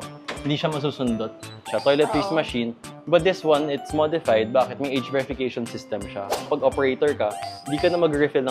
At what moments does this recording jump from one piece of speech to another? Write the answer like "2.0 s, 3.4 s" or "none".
1.8 s, 6.4 s